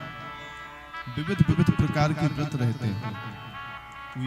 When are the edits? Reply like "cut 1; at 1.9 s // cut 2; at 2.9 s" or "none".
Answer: none